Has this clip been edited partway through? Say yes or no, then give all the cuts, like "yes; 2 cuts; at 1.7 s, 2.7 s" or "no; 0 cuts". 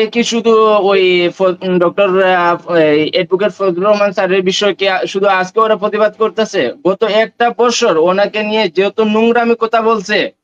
no; 0 cuts